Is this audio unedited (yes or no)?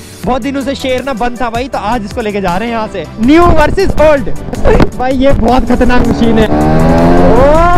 no